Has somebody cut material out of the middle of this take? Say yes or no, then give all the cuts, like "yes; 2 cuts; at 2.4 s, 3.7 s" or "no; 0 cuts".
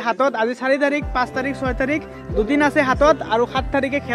no; 0 cuts